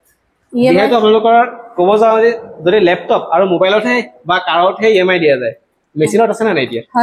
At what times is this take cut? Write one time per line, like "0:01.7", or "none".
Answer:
none